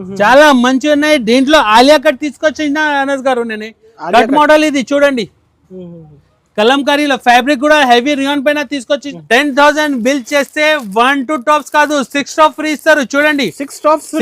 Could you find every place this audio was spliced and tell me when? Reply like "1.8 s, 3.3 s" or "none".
9.1 s